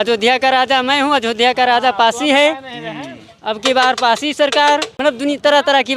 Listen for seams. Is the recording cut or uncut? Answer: cut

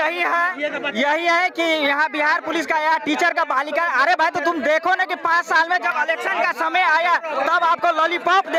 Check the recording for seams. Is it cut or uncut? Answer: uncut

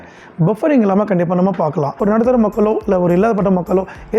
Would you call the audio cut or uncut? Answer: cut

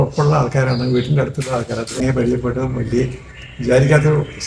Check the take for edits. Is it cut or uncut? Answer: cut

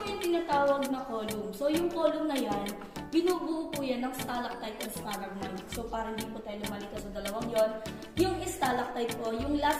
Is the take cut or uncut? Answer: uncut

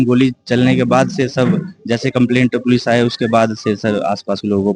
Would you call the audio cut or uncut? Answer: uncut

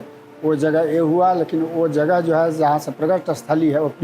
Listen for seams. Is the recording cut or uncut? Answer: uncut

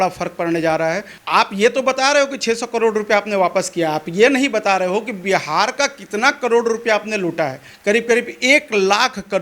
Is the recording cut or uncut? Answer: cut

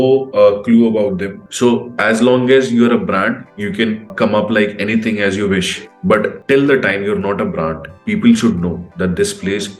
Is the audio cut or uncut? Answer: cut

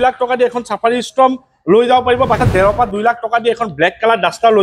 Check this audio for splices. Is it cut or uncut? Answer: cut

